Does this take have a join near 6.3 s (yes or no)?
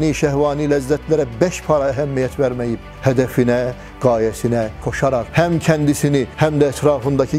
no